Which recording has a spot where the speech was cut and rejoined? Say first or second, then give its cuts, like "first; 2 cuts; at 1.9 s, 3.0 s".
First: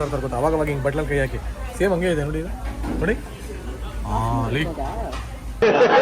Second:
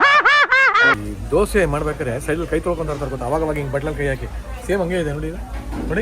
second; 1 cut; at 0.9 s